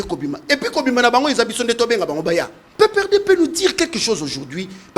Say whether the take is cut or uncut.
cut